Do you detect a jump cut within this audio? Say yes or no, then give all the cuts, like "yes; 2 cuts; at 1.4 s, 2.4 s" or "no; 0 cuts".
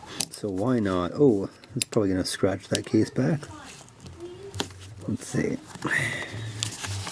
no; 0 cuts